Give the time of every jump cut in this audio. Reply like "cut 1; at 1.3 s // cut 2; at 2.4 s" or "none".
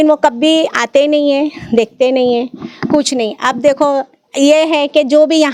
none